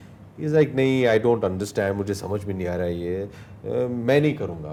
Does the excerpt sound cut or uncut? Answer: uncut